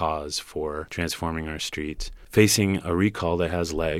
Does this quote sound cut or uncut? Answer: cut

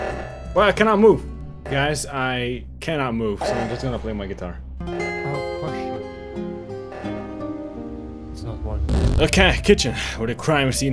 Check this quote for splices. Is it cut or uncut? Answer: cut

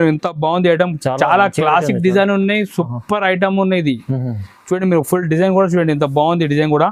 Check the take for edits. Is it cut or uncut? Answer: uncut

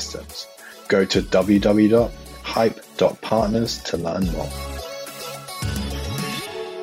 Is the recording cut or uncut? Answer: cut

